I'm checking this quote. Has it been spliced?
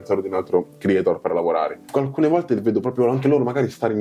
yes; 1 cut; at 1.9 s

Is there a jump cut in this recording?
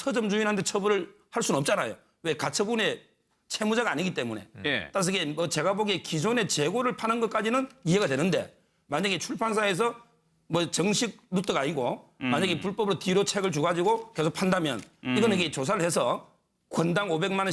yes; 1 cut; at 4.4 s

